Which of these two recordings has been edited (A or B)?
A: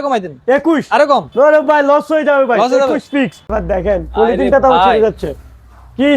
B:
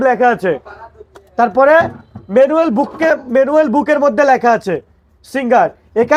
A